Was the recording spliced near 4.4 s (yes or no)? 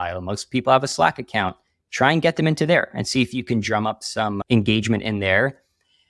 yes